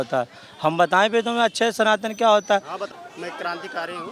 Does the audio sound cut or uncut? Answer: cut